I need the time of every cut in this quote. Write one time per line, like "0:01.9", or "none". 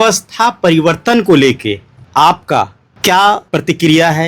0:01.9
0:02.8
0:03.4

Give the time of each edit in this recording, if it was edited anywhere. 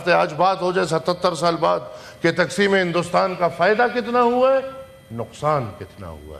none

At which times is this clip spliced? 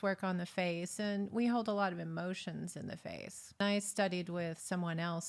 0:03.6

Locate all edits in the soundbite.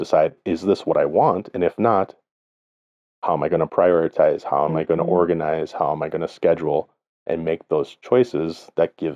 none

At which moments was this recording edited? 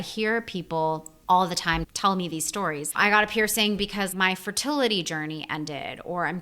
0:01.1
0:02.8
0:04.1

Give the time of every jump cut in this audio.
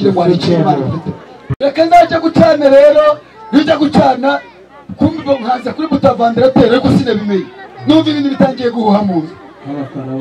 0:01.5

